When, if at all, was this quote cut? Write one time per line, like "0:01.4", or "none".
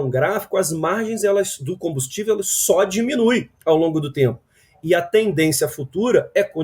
none